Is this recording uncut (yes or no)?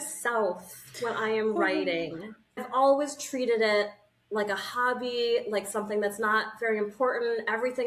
no